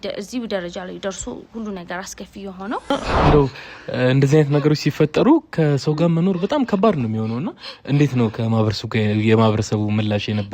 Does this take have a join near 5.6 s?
no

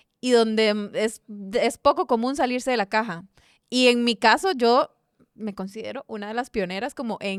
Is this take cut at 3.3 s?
no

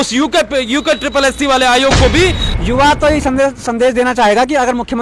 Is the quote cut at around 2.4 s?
yes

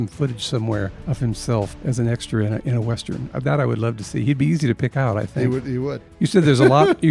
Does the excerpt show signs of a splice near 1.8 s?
yes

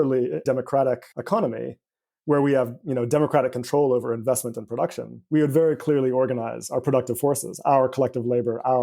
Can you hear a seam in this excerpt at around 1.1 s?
yes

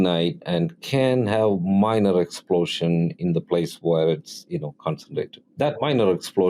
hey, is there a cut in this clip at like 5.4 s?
yes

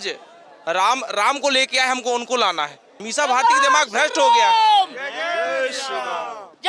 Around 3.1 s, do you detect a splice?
yes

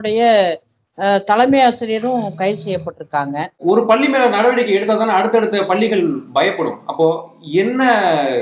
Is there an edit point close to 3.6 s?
yes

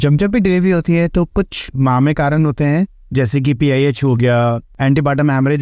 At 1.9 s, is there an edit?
no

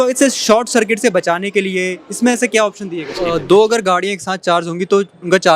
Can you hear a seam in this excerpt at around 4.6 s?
no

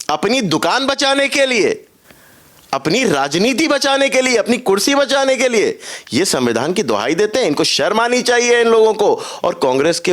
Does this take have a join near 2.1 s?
no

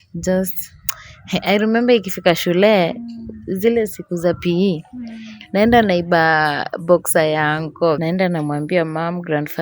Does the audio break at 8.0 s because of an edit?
yes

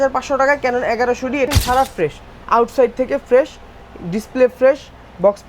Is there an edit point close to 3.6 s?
no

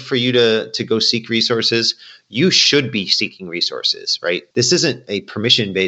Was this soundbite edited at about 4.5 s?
yes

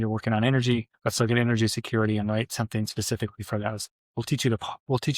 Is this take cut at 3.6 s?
no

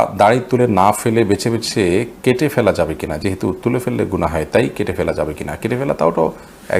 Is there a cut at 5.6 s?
no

